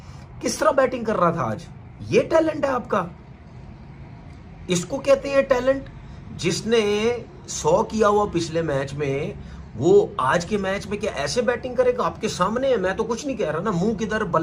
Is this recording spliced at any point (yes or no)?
no